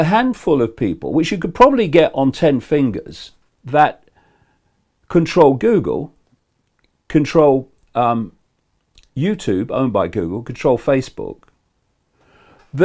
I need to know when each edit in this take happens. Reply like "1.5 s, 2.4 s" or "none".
3.5 s